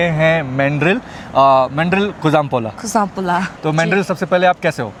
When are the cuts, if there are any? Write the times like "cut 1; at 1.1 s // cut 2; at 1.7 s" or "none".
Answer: none